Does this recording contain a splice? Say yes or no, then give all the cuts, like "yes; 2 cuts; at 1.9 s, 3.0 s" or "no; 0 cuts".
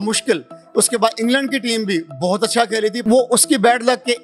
yes; 1 cut; at 3.0 s